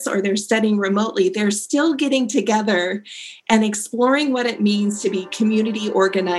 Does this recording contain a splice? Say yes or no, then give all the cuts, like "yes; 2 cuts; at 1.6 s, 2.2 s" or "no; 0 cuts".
no; 0 cuts